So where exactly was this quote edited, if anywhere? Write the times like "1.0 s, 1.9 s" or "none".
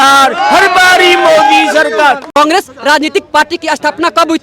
2.3 s